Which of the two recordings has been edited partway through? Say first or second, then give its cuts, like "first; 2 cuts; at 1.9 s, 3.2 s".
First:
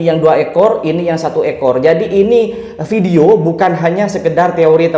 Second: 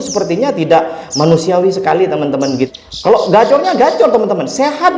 second; 1 cut; at 2.7 s